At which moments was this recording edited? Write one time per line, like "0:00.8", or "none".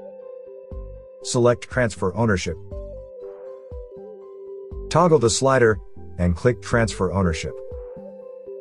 0:01.3
0:02.7
0:04.9
0:07.4